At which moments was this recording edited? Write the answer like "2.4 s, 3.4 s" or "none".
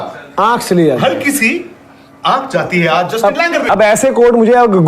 3.7 s